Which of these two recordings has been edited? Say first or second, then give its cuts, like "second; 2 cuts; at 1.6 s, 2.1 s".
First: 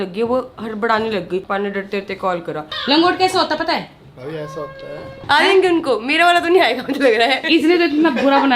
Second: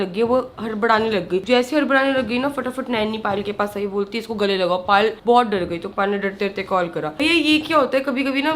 first; 4 cuts; at 1.4 s, 2.6 s, 5.1 s, 7.4 s